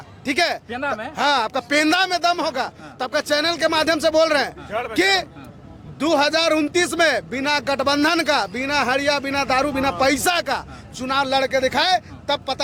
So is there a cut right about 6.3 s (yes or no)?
no